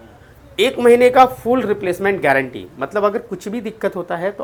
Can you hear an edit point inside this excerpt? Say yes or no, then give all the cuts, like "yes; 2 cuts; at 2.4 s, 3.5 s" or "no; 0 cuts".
no; 0 cuts